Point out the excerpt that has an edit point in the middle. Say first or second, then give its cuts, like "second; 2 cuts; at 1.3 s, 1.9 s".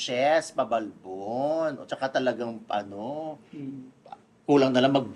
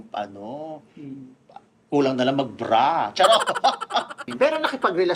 second; 1 cut; at 4.2 s